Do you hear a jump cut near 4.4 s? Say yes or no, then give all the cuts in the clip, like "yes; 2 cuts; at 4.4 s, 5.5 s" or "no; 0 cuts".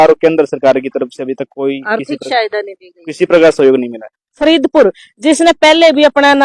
yes; 1 cut; at 4.4 s